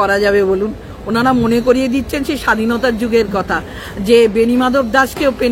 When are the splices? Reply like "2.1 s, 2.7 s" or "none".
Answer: none